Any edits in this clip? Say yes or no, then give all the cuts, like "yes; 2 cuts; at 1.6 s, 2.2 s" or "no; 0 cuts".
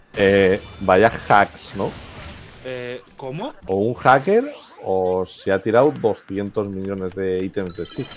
yes; 1 cut; at 3.6 s